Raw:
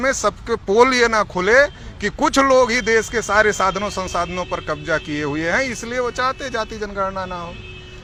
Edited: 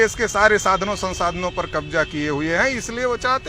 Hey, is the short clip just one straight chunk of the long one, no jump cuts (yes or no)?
yes